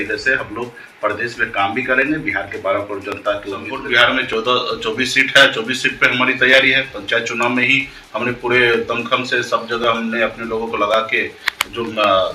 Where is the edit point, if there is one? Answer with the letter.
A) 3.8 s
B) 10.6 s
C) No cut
A